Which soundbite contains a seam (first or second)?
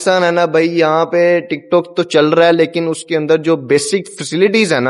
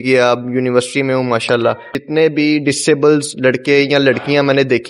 second